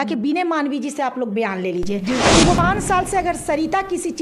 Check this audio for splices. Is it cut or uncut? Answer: cut